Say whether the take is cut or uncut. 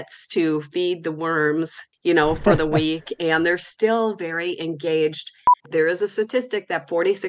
cut